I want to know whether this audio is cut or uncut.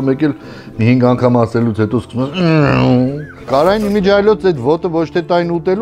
cut